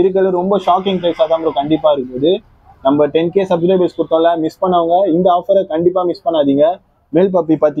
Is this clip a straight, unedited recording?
yes; 0 cuts

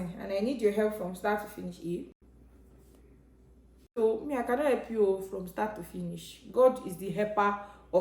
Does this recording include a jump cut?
yes; 1 cut; at 3.9 s

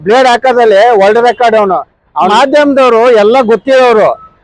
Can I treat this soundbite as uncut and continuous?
no; 1 cut; at 2.3 s

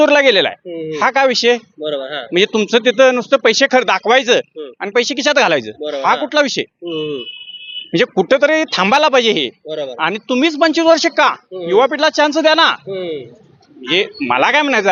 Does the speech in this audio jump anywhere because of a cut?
no; 0 cuts

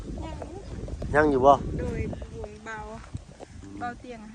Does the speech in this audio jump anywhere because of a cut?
no; 0 cuts

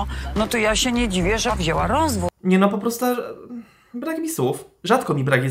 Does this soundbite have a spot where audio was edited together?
yes; 1 cut; at 2.3 s

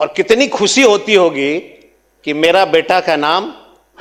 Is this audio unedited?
yes; 0 cuts

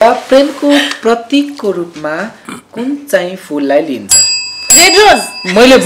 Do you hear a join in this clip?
no; 0 cuts

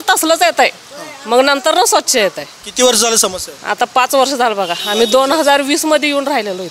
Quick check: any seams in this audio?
no; 0 cuts

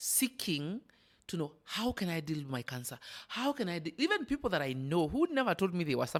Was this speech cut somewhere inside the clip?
no; 0 cuts

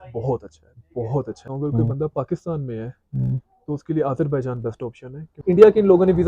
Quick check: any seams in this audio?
yes; 2 cuts; at 1.4 s, 5.3 s

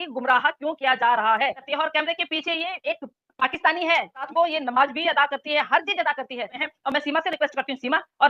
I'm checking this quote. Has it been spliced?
yes; 3 cuts; at 1.6 s, 4.3 s, 6.6 s

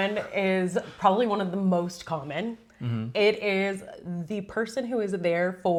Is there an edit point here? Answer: no; 0 cuts

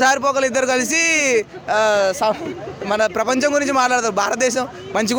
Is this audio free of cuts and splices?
yes; 0 cuts

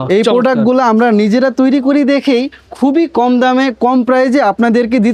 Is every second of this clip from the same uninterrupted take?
yes; 0 cuts

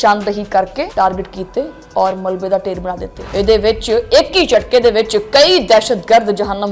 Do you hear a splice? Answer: no; 0 cuts

